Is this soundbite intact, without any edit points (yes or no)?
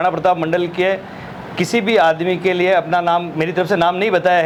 yes